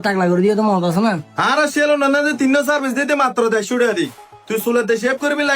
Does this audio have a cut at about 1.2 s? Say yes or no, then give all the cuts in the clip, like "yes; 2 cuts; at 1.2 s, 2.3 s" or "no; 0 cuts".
yes; 1 cut; at 1.2 s